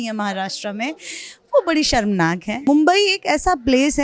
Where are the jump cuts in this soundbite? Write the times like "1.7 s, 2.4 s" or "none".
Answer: 2.6 s